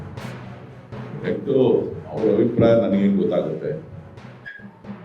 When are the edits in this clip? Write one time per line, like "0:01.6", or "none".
0:01.2